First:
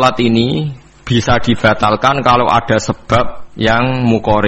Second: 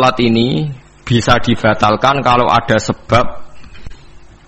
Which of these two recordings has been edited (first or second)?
first